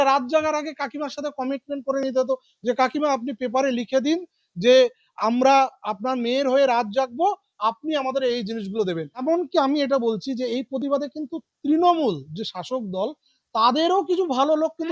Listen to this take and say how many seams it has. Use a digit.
1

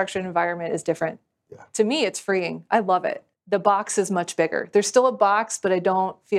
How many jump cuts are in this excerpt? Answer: 1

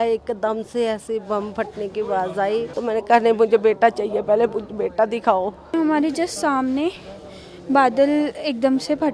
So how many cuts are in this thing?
2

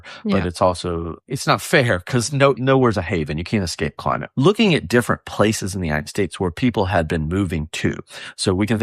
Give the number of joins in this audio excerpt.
3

